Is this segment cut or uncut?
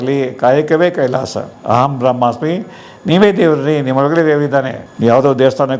cut